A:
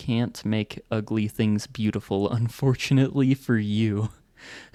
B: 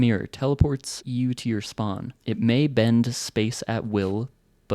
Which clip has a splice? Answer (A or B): B